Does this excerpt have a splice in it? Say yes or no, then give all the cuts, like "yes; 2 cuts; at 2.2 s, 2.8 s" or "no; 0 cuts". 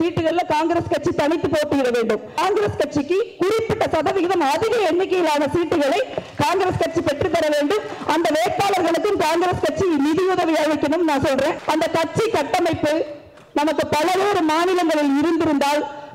yes; 2 cuts; at 2.4 s, 11.6 s